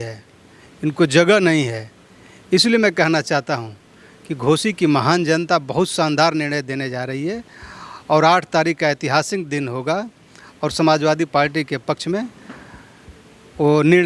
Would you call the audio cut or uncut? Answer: uncut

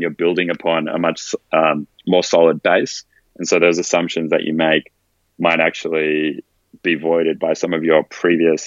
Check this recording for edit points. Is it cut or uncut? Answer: uncut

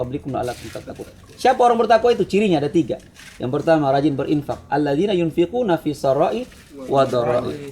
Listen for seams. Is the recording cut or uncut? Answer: uncut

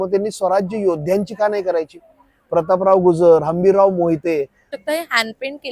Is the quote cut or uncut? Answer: cut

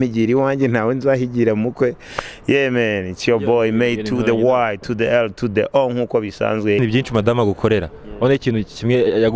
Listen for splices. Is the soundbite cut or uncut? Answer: cut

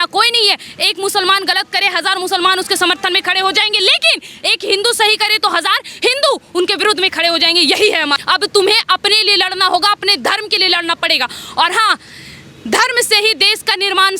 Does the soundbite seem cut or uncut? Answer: cut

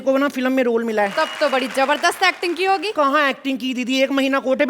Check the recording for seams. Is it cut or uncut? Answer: cut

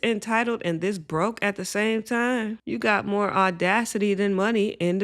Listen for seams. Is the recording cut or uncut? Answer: cut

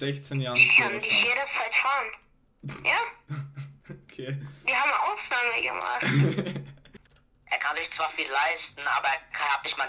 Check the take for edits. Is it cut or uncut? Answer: cut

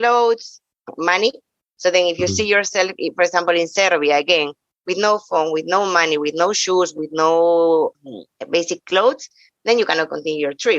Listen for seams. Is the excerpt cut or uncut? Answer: uncut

